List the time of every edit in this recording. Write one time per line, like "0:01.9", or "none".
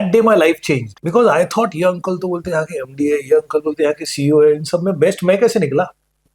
0:00.9